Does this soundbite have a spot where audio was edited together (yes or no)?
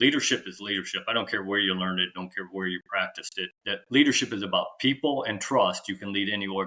yes